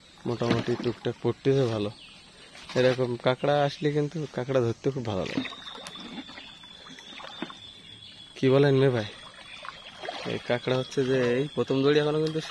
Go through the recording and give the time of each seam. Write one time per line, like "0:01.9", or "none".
none

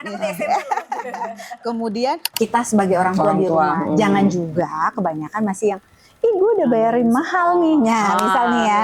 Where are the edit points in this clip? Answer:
0:02.3

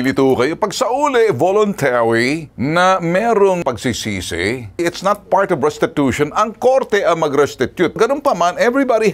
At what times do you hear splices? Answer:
0:04.8
0:08.0

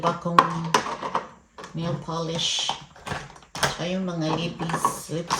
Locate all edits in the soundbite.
none

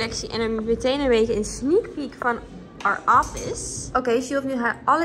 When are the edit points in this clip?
0:03.7

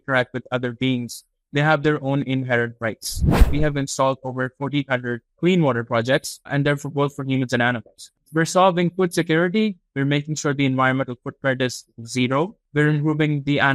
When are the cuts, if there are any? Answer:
0:03.5
0:05.3
0:06.5
0:08.1
0:12.6

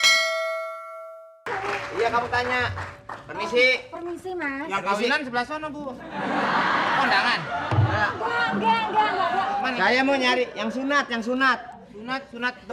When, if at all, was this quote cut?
0:01.5

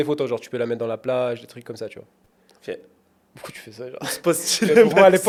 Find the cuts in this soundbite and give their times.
none

